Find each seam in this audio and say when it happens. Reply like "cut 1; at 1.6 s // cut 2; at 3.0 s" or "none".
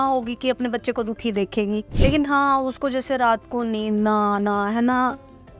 cut 1; at 1.9 s